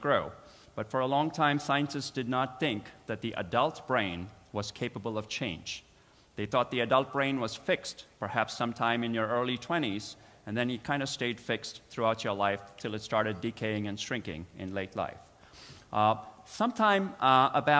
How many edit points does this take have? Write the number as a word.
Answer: one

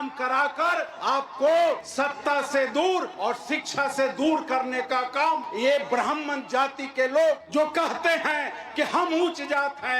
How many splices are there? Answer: five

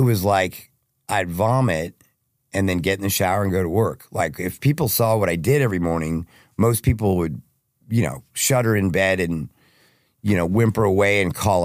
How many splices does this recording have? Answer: zero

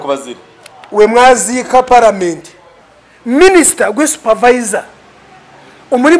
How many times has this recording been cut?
one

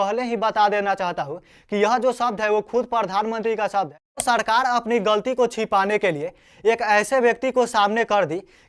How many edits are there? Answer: one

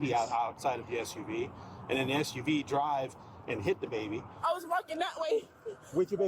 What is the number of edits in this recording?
one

